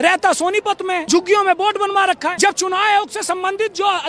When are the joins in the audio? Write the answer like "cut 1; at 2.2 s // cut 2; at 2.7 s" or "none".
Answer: cut 1; at 1.0 s // cut 2; at 2.3 s

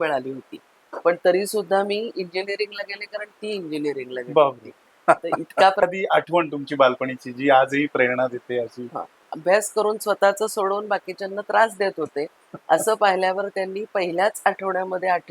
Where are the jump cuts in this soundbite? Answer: cut 1; at 5.8 s // cut 2; at 9.3 s

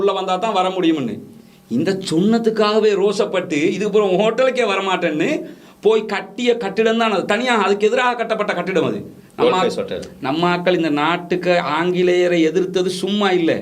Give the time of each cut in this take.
none

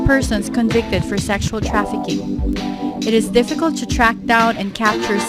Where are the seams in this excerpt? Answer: cut 1; at 2.2 s

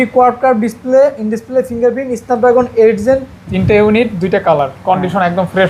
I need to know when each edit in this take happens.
cut 1; at 3.4 s

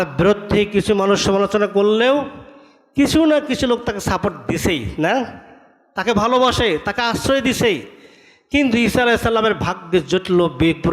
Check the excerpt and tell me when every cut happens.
none

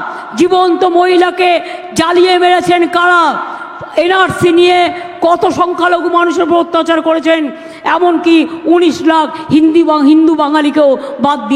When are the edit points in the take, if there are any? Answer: none

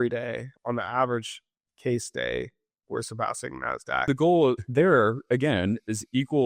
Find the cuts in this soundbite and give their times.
cut 1; at 4.1 s

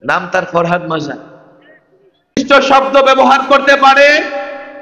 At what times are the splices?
cut 1; at 2.3 s

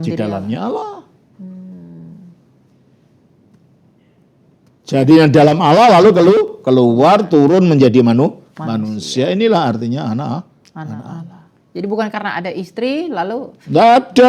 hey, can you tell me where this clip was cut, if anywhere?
none

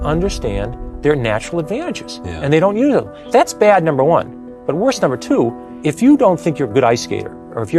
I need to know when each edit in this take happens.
cut 1; at 3.2 s // cut 2; at 5.7 s

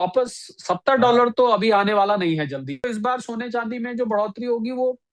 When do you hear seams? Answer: cut 1; at 2.9 s

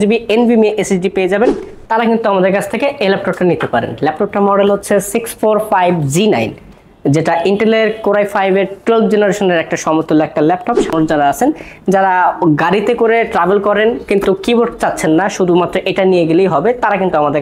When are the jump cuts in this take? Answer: cut 1; at 1.7 s // cut 2; at 10.9 s

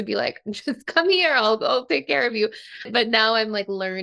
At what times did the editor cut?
cut 1; at 2.9 s

